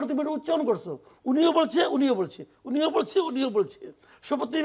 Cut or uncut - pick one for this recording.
uncut